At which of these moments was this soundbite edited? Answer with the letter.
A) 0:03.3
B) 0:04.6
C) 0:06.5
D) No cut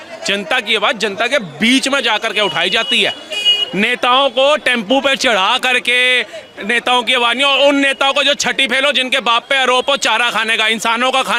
D